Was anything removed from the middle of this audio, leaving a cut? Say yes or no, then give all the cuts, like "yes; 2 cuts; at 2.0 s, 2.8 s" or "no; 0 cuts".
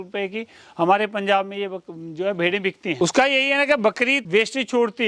yes; 2 cuts; at 3.0 s, 4.2 s